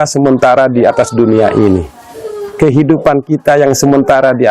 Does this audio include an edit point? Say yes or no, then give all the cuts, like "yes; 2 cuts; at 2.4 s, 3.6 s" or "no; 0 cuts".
no; 0 cuts